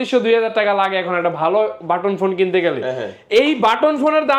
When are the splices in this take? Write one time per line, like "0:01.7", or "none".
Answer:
none

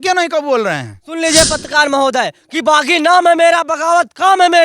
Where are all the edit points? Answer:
0:01.0

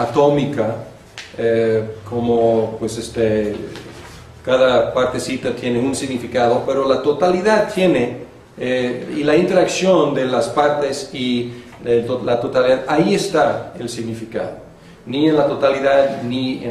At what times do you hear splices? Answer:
none

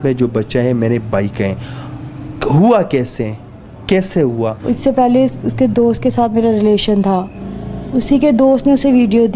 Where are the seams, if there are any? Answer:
0:04.6
0:07.4

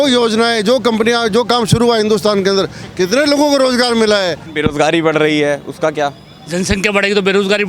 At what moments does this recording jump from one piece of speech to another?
0:04.5

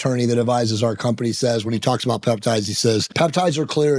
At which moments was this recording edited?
0:03.1

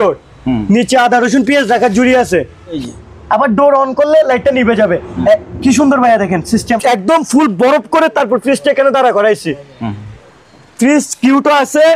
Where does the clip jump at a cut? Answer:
0:02.8
0:06.7

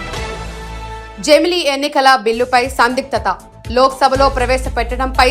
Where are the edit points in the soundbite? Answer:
0:01.0

